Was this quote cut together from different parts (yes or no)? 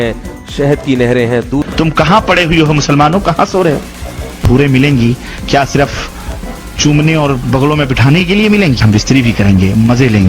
yes